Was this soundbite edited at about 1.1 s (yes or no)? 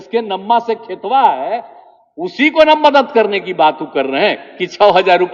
no